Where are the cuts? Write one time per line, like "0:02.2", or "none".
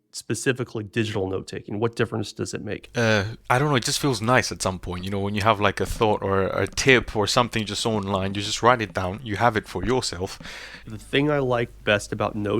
0:03.4
0:10.9